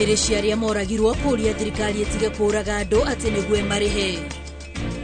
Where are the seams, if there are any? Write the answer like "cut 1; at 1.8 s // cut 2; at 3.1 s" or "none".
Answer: cut 1; at 4.1 s

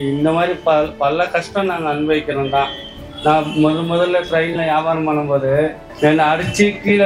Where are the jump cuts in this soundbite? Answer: cut 1; at 3.1 s

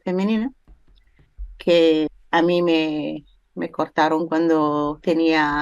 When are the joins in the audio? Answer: cut 1; at 2.1 s

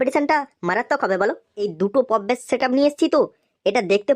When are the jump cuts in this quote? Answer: cut 1; at 1.7 s

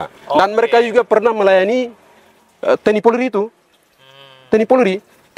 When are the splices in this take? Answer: none

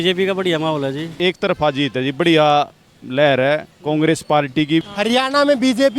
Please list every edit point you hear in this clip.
cut 1; at 1.1 s // cut 2; at 4.8 s

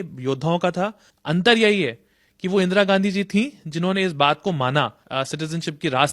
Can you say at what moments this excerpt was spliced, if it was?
cut 1; at 1.1 s // cut 2; at 5.0 s

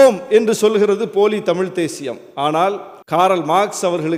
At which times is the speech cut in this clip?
none

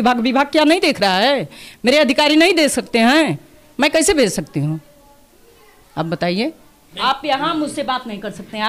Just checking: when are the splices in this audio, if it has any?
cut 1; at 6.9 s

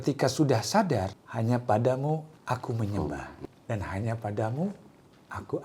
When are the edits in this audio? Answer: cut 1; at 1.2 s // cut 2; at 2.3 s // cut 3; at 3.3 s

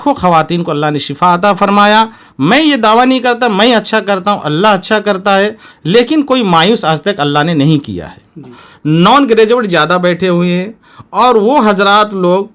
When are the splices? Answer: cut 1; at 8.6 s

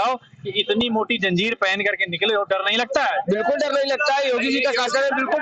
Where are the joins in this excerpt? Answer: none

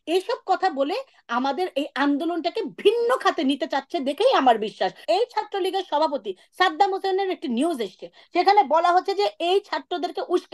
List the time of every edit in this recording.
cut 1; at 5.0 s

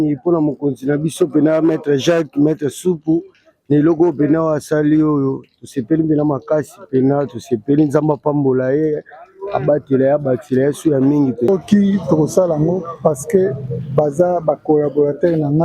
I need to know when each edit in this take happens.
cut 1; at 11.5 s

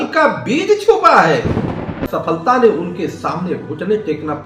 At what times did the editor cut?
cut 1; at 2.0 s

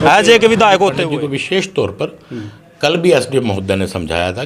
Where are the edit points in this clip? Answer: cut 1; at 1.0 s

